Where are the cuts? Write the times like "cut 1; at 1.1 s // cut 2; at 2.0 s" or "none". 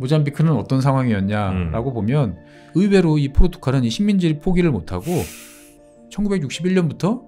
cut 1; at 2.6 s // cut 2; at 5.7 s